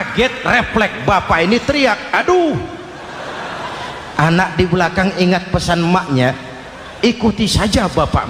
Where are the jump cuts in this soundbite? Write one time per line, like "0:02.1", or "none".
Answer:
none